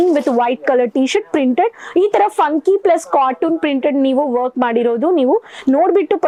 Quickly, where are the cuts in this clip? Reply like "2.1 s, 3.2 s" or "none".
none